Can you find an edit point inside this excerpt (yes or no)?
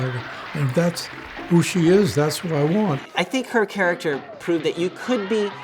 yes